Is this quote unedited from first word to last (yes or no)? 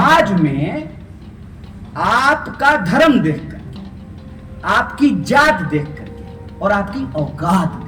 yes